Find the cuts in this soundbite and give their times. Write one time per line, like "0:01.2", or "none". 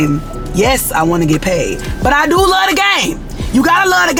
none